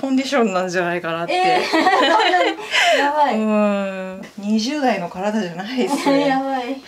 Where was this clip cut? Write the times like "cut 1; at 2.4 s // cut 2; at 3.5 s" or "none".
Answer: cut 1; at 4.2 s